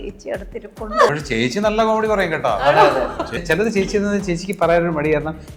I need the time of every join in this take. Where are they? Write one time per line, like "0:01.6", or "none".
0:01.1
0:03.4